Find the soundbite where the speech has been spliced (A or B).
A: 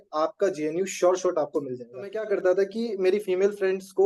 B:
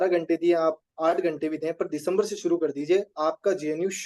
A